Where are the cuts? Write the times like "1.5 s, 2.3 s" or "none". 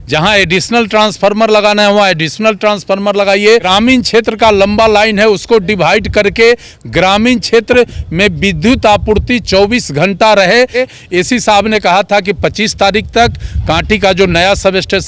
3.6 s, 10.8 s

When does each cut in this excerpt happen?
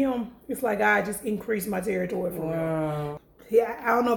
3.1 s

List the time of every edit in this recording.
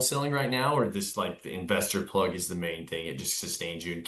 none

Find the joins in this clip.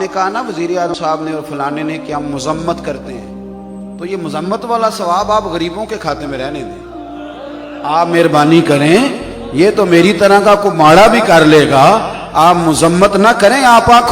0.9 s

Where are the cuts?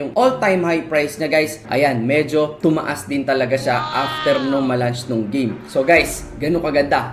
5.6 s

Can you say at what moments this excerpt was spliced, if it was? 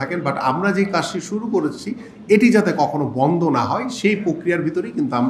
none

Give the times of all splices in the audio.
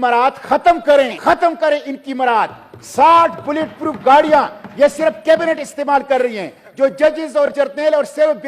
1.1 s

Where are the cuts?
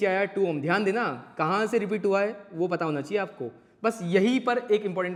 none

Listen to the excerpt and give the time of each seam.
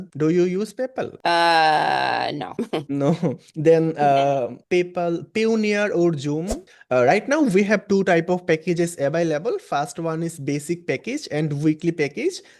6.7 s

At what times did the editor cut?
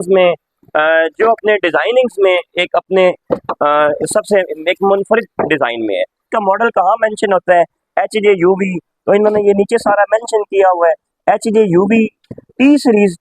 none

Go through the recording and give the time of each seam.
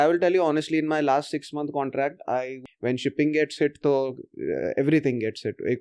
2.5 s

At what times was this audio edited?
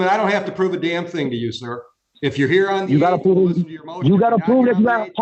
none

